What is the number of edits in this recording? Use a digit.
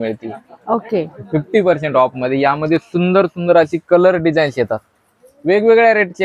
0